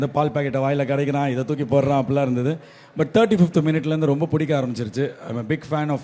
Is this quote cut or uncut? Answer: uncut